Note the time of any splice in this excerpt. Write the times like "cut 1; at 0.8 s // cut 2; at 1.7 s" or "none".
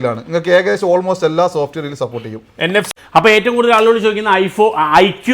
cut 1; at 2.9 s